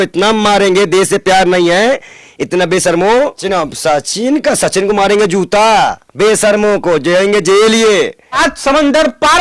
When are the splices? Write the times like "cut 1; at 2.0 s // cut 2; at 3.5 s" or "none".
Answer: cut 1; at 3.4 s // cut 2; at 8.4 s